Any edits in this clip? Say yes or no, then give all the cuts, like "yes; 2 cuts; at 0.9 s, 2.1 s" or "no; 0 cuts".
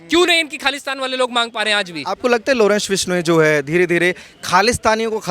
yes; 1 cut; at 2.2 s